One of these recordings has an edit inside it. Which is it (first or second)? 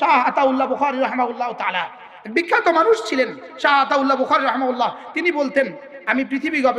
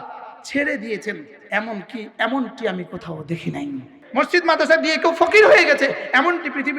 second